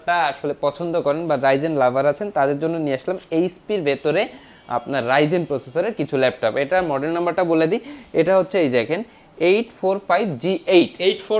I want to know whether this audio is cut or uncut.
uncut